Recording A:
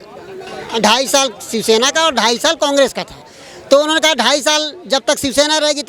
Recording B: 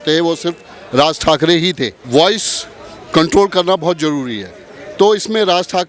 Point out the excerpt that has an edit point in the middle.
B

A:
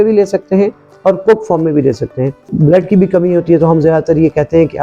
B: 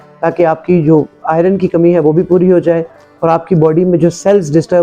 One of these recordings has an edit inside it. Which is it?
A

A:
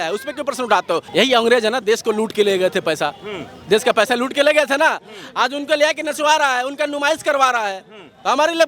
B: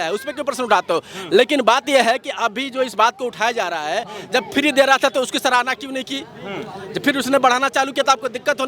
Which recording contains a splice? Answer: A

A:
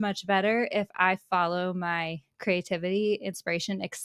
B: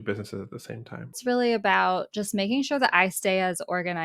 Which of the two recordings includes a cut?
B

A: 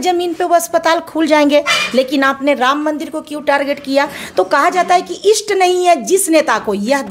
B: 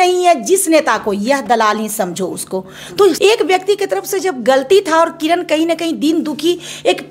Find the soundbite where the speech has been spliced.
B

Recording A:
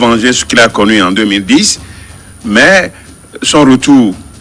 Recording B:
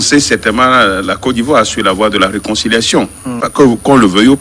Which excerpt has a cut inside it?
B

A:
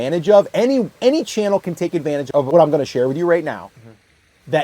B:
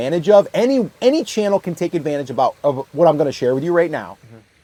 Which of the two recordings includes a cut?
A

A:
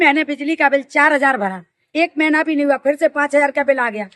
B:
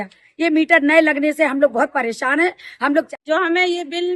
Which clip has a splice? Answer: B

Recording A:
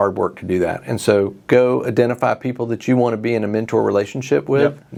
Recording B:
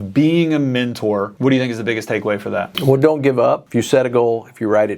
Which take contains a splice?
B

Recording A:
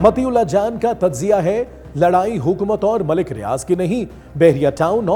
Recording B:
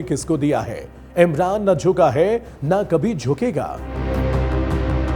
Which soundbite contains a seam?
B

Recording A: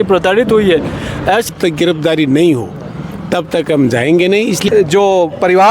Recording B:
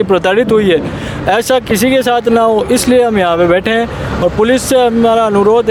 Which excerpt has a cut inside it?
A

